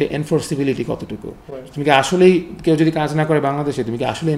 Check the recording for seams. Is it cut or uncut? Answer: uncut